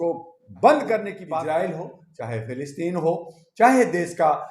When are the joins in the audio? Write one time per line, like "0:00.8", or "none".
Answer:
0:01.2